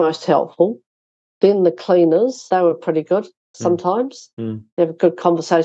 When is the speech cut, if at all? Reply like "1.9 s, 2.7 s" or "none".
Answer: 2.5 s